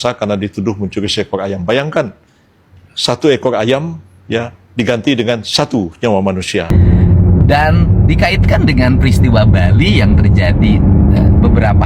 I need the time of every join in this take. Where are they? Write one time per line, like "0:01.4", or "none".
0:06.7

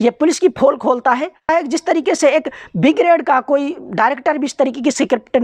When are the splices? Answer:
0:01.4

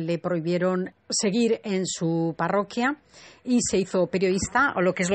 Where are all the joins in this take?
0:02.9

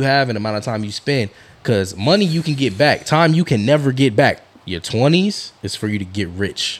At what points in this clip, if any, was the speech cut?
0:04.5

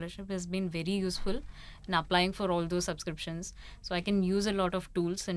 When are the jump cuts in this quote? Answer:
none

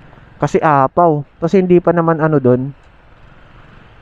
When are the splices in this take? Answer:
0:01.3

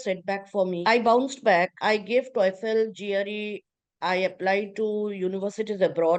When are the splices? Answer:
0:00.8
0:01.8

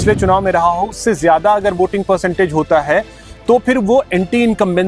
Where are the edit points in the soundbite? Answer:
none

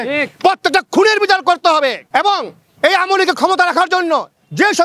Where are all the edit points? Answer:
0:02.0

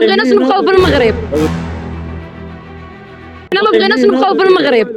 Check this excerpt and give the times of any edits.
none

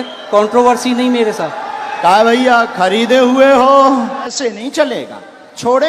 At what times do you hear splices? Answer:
0:04.3

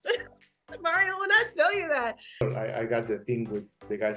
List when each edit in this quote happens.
0:02.4

